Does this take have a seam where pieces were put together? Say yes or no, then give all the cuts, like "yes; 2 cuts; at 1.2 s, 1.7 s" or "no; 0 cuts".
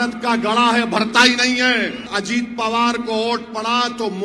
yes; 1 cut; at 2.1 s